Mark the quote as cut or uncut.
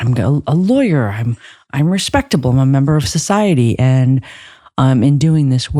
uncut